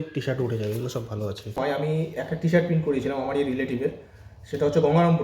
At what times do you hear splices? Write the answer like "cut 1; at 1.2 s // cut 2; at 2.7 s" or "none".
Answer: cut 1; at 1.6 s